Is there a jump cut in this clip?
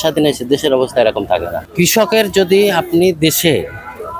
yes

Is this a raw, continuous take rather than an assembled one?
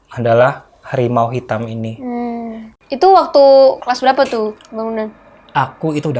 no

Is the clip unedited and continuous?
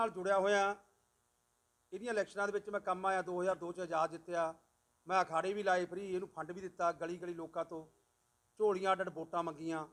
yes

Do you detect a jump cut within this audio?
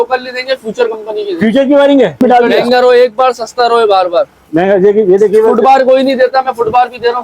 yes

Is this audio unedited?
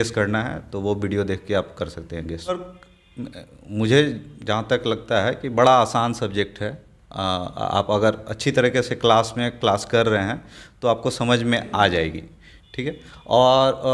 no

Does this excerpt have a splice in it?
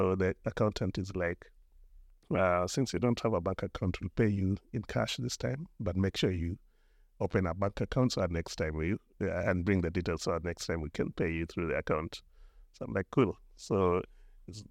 no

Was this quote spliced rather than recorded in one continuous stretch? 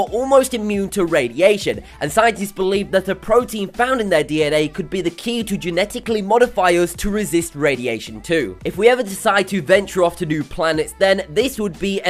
yes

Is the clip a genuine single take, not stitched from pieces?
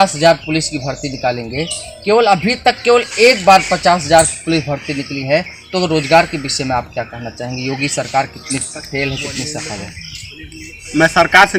yes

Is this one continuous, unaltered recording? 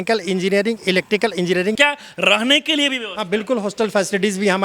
no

